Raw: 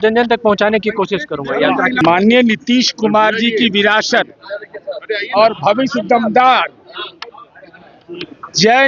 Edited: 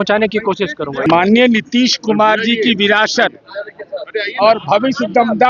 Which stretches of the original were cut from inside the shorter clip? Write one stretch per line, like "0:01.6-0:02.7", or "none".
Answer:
0:01.5-0:02.0